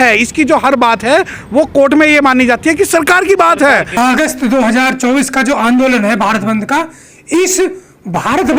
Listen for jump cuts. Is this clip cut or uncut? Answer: cut